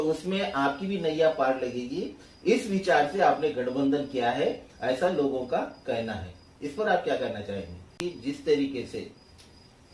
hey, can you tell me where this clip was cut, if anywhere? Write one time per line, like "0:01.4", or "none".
0:07.8